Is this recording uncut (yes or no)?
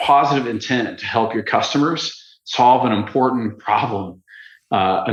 yes